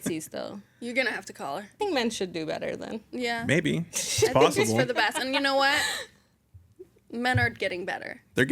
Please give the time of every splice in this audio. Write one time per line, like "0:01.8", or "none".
0:01.8